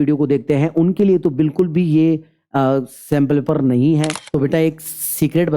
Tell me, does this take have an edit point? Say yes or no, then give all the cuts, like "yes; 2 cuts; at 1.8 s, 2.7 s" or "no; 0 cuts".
yes; 1 cut; at 4.1 s